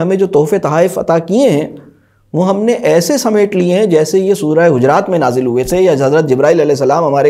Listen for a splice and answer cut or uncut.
uncut